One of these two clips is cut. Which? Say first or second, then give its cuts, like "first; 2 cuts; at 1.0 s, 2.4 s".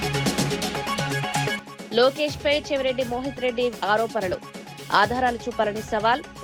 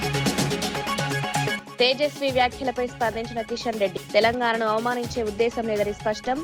second; 1 cut; at 1.6 s